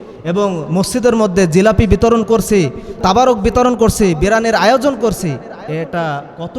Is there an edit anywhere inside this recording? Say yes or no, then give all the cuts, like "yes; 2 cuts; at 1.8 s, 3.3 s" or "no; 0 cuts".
yes; 1 cut; at 5.5 s